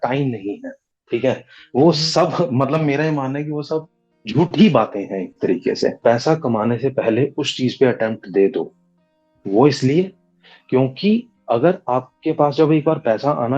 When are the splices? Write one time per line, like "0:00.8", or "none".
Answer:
0:06.0